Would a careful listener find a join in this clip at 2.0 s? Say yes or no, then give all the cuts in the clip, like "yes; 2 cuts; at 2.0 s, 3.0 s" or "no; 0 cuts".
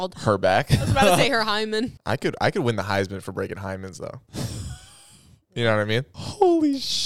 yes; 2 cuts; at 2.0 s, 6.1 s